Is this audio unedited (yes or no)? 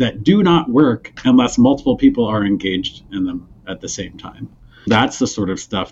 no